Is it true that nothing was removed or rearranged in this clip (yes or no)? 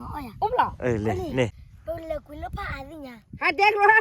no